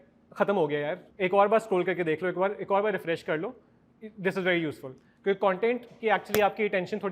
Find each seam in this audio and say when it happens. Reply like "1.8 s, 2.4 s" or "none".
1.0 s

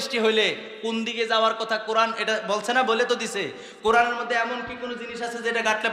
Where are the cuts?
none

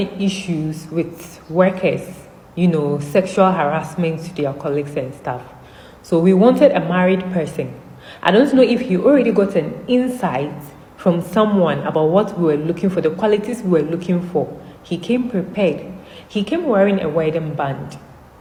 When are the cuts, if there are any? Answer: none

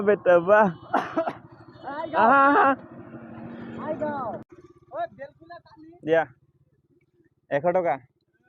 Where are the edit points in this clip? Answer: 4.5 s

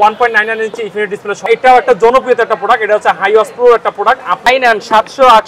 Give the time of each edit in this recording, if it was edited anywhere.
1.5 s, 4.5 s

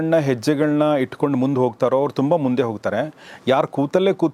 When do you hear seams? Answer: none

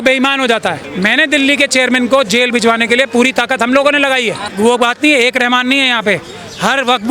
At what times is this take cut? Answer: 0.9 s, 4.4 s

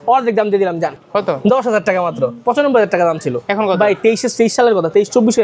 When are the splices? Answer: 1.0 s, 2.4 s

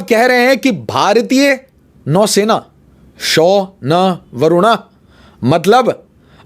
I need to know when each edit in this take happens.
none

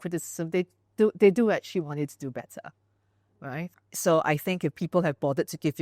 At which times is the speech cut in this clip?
none

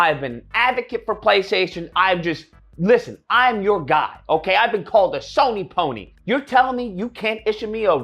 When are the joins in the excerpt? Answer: 6.0 s

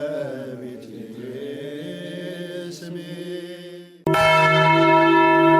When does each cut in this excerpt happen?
3.8 s

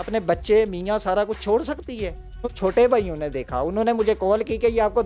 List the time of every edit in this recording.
none

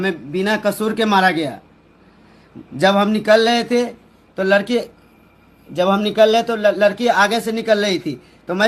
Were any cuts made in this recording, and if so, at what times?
none

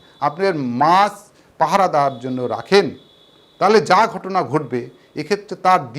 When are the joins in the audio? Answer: none

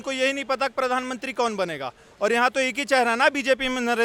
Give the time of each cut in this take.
none

